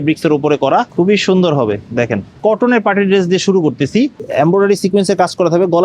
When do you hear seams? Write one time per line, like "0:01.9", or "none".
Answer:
0:00.9
0:02.4
0:04.2